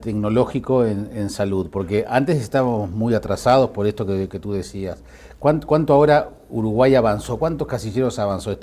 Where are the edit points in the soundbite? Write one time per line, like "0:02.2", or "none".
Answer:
0:03.0

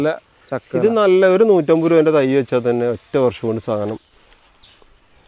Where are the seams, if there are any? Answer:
0:04.1

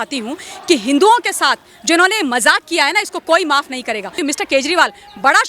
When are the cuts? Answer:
0:04.2

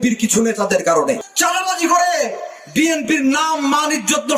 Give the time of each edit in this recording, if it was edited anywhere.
0:01.2

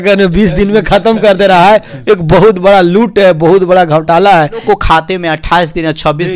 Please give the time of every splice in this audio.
0:04.6

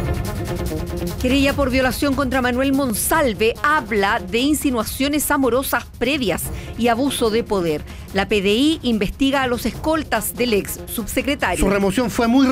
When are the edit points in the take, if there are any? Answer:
0:01.2

